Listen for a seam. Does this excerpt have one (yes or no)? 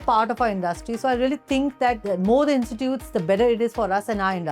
yes